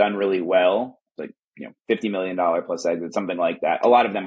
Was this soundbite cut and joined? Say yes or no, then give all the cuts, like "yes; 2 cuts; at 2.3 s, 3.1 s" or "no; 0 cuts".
yes; 1 cut; at 1.0 s